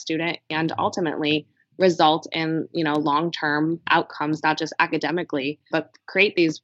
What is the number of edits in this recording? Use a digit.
2